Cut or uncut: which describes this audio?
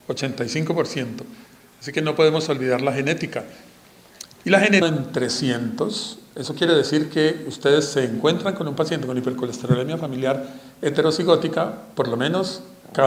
uncut